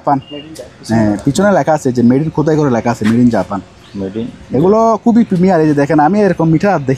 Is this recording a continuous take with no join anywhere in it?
yes; 0 cuts

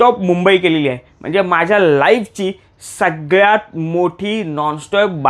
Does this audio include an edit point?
no; 0 cuts

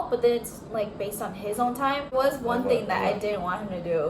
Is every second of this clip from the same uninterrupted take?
no; 1 cut; at 2.1 s

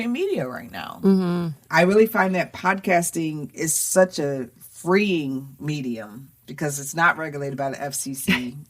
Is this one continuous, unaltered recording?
no; 1 cut; at 1.6 s

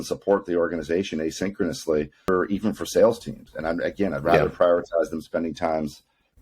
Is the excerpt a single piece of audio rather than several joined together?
no; 1 cut; at 2.3 s

